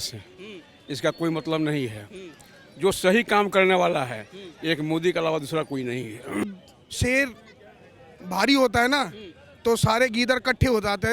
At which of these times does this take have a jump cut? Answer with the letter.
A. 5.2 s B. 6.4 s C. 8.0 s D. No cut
B